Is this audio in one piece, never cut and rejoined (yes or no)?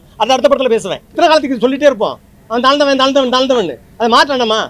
no